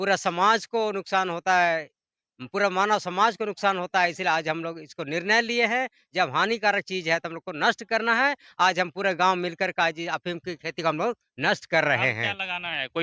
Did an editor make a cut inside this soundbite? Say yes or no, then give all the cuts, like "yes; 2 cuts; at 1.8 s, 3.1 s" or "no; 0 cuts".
no; 0 cuts